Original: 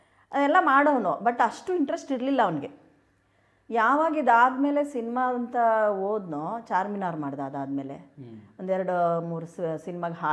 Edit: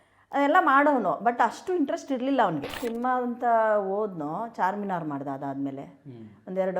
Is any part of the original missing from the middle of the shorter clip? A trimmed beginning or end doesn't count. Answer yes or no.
yes